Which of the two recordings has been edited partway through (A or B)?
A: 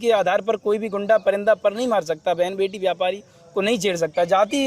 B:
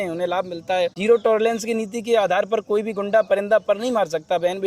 B